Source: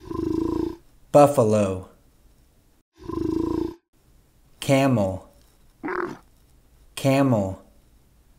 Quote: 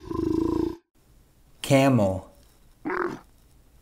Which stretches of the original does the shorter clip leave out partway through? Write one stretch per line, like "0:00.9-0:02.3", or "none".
0:00.9-0:03.9